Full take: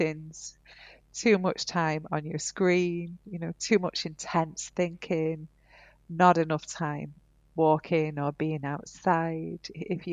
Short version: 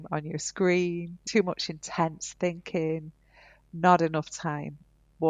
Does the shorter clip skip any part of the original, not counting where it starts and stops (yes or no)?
yes